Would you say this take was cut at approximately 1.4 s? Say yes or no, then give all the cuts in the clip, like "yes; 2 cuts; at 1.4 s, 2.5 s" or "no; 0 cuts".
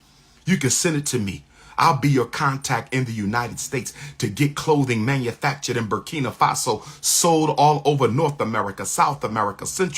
no; 0 cuts